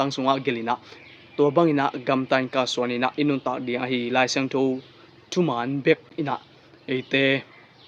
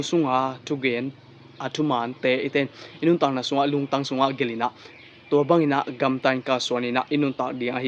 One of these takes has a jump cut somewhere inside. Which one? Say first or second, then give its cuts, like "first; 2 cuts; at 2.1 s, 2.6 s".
first; 1 cut; at 6.1 s